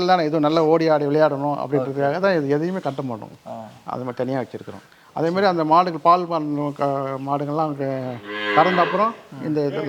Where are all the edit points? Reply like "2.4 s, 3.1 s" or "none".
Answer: none